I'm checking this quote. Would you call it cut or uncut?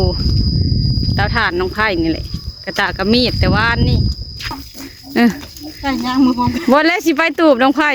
cut